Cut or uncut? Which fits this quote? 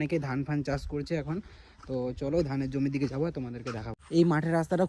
cut